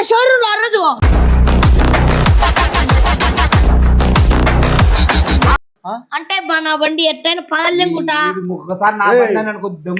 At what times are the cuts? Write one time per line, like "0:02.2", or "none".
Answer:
0:00.9
0:05.7